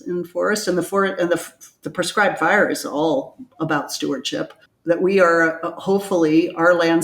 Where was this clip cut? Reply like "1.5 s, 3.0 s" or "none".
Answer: 4.7 s